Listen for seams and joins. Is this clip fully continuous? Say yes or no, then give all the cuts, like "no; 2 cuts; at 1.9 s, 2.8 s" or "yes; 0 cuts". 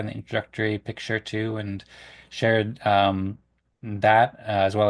yes; 0 cuts